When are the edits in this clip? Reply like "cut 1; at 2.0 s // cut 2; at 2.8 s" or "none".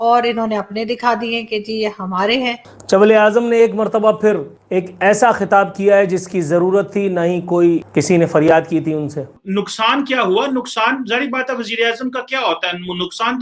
cut 1; at 2.7 s // cut 2; at 4.5 s // cut 3; at 7.9 s // cut 4; at 9.4 s

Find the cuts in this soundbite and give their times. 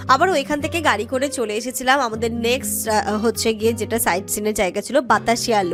none

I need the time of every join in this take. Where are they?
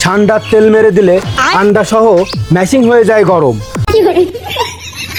none

